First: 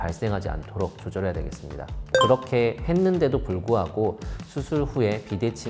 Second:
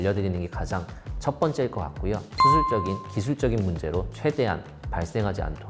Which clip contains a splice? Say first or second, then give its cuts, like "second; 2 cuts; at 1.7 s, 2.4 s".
second; 1 cut; at 2.3 s